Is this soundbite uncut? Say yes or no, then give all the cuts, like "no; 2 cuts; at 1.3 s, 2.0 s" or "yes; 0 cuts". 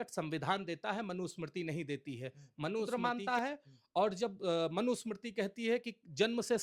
no; 1 cut; at 2.9 s